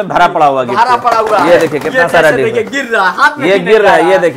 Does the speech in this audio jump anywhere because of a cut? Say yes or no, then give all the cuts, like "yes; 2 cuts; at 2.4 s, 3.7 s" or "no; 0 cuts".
no; 0 cuts